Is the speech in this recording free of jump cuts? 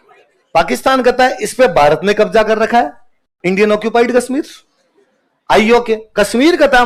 yes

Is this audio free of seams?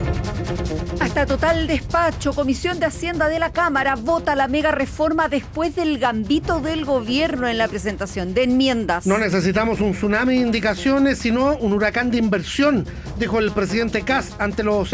no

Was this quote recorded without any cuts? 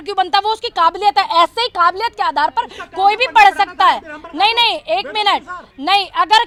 yes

